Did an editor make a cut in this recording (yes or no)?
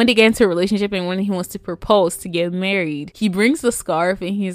no